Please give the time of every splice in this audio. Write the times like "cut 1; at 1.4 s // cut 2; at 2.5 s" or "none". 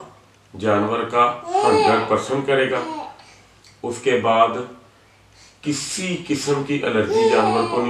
none